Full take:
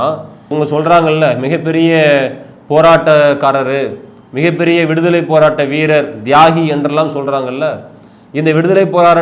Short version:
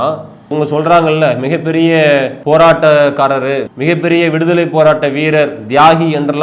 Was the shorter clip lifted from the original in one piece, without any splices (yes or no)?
no